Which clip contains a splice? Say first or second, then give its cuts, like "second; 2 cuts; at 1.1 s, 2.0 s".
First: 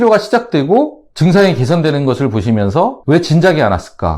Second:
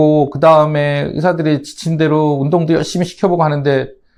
first; 2 cuts; at 1.0 s, 3.0 s